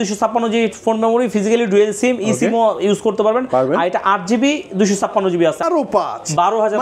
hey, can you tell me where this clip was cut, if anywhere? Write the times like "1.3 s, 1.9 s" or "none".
5.6 s